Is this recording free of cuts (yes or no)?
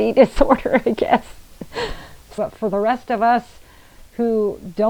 no